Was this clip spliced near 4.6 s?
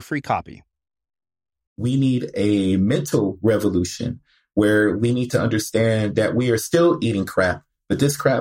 no; 1 cut; at 1.8 s

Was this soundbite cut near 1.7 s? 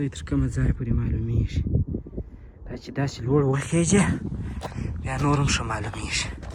no; 0 cuts

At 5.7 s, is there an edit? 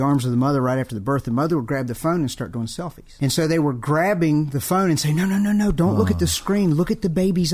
no; 1 cut; at 3.0 s

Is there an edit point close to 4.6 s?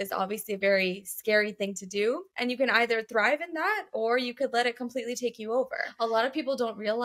no; 2 cuts; at 2.3 s, 5.8 s

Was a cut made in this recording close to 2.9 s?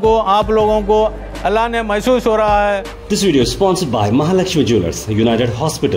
yes; 1 cut; at 2.9 s

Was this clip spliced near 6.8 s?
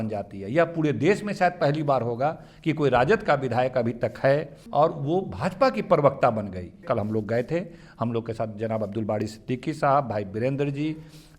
yes; 2 cuts; at 4.6 s, 6.8 s

